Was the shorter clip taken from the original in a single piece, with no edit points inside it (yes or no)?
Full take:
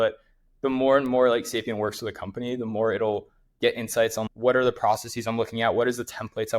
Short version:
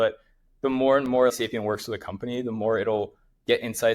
no